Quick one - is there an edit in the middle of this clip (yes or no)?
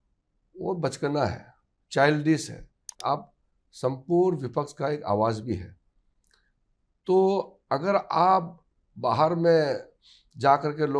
yes